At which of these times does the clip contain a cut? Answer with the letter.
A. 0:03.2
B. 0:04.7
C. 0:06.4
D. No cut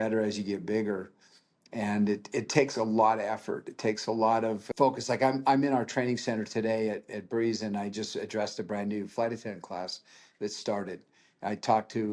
B